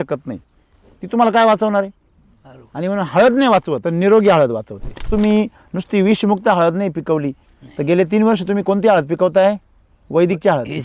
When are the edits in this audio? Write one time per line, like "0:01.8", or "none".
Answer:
0:03.8
0:05.0